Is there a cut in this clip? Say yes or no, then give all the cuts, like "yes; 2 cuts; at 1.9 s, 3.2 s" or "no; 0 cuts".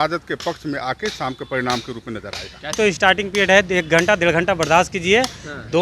yes; 1 cut; at 2.8 s